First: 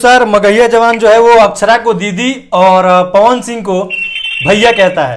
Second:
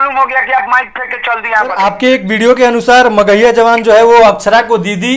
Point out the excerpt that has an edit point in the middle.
second; 1 cut; at 1.7 s

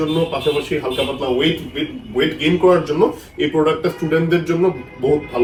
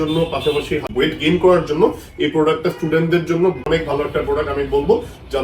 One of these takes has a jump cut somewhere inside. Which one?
second; 2 cuts; at 0.9 s, 3.6 s

